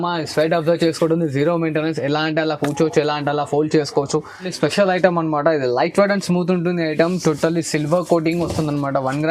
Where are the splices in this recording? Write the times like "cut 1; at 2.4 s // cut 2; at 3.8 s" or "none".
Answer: cut 1; at 4.5 s